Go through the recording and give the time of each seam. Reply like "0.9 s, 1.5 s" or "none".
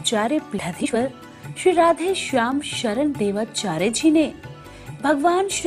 0.9 s, 3.1 s